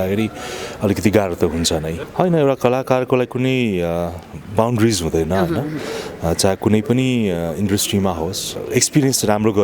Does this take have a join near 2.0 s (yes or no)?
yes